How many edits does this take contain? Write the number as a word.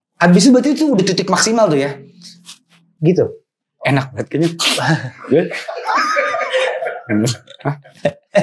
one